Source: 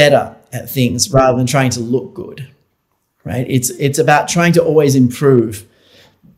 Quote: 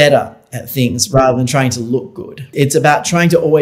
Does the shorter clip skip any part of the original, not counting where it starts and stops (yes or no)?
yes